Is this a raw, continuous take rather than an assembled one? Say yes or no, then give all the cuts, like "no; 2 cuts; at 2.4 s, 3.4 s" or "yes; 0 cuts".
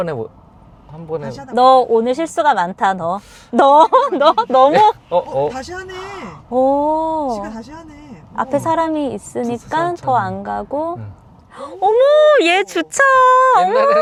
yes; 0 cuts